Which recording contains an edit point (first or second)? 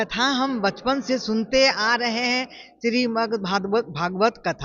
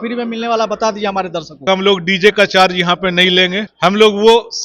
second